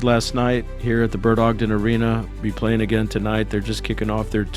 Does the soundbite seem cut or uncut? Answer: uncut